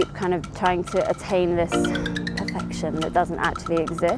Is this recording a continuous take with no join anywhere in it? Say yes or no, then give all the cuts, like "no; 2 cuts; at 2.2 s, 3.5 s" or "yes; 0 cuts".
yes; 0 cuts